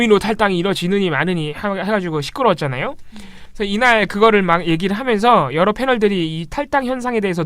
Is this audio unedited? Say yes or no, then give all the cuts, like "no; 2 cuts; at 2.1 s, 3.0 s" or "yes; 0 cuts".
no; 1 cut; at 3.0 s